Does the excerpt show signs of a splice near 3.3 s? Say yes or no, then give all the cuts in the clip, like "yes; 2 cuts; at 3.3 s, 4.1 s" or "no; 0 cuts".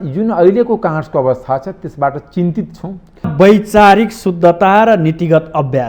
yes; 1 cut; at 3.3 s